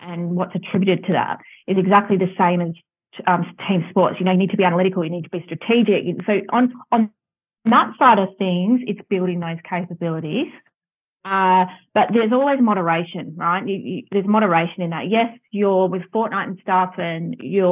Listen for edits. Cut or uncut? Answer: uncut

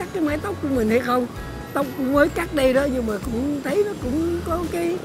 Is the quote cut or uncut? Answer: uncut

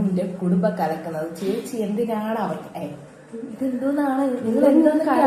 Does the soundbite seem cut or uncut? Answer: uncut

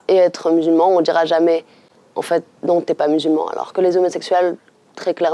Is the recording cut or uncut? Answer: uncut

